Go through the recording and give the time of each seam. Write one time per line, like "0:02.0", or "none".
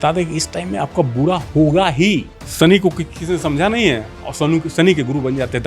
0:02.4